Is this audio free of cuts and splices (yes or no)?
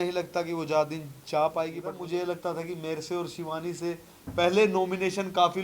no